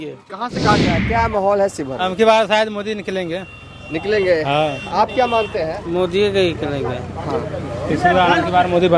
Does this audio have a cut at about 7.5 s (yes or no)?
no